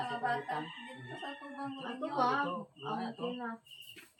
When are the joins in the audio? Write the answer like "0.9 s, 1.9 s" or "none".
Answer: none